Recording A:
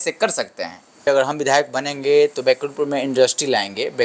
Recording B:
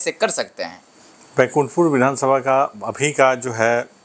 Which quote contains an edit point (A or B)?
A